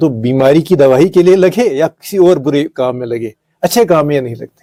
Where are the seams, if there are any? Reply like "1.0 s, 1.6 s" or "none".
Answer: none